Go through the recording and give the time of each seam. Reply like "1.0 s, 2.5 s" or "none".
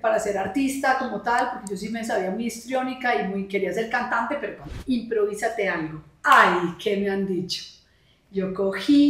4.7 s